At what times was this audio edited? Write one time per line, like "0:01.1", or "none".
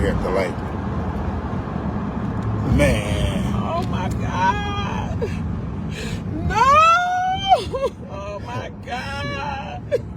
none